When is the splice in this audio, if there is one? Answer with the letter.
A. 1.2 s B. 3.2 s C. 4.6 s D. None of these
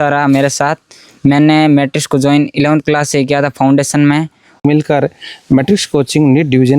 C